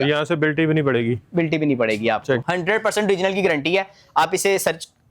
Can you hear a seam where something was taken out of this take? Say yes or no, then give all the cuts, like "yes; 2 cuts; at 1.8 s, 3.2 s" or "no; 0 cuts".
yes; 1 cut; at 2.4 s